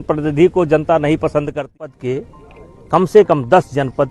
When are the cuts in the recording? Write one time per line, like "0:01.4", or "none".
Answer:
0:01.9